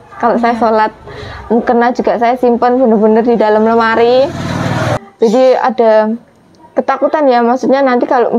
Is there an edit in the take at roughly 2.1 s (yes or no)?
no